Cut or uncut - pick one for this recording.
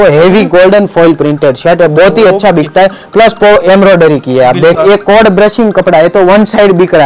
cut